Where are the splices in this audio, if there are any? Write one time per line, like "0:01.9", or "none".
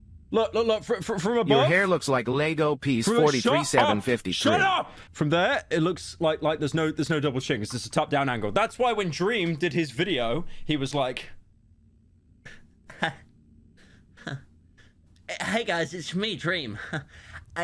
0:05.0